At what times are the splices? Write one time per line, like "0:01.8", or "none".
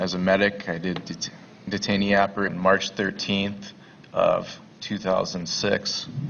none